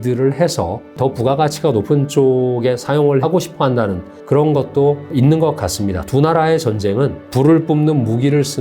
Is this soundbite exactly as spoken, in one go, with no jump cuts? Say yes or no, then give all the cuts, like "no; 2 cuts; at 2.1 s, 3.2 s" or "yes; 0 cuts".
no; 5 cuts; at 1.0 s, 3.1 s, 4.1 s, 5.0 s, 7.2 s